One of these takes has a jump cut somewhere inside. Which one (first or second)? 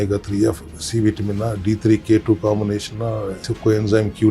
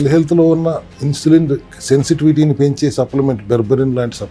first